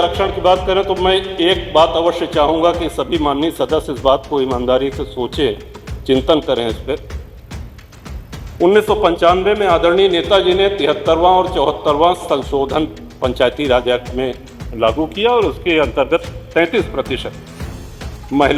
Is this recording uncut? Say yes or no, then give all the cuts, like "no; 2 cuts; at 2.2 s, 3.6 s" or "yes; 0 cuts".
yes; 0 cuts